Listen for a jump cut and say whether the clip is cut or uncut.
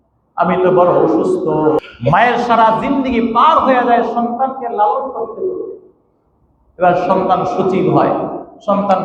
cut